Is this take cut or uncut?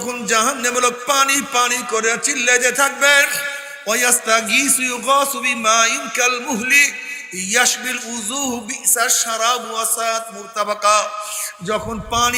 uncut